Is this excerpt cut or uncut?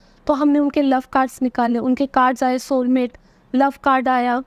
uncut